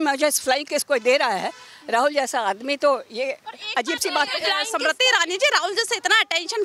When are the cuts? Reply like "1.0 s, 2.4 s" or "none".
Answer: 4.6 s

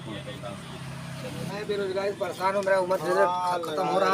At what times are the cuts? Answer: 1.5 s

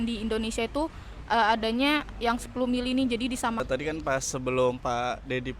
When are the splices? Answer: 3.6 s

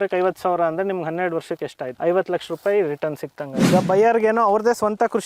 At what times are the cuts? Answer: 1.9 s, 3.7 s

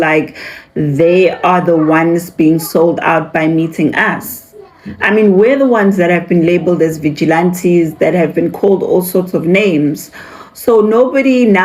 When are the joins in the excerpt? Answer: none

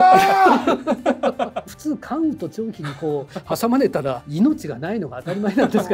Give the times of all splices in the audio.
1.6 s, 4.2 s

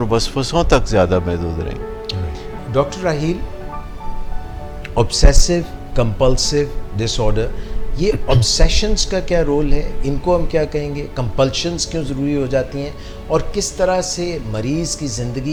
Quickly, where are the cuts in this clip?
none

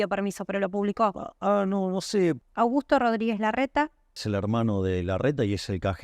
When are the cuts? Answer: 2.4 s, 4.2 s

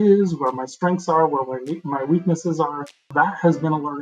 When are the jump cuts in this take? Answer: 3.1 s

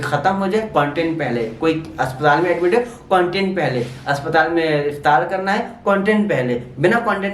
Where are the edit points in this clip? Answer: none

